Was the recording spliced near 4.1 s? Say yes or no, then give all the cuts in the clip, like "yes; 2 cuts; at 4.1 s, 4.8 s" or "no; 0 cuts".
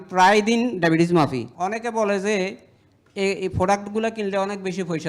no; 1 cut; at 1.4 s